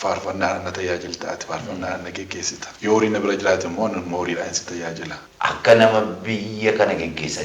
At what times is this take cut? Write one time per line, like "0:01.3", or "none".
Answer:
0:02.6
0:05.2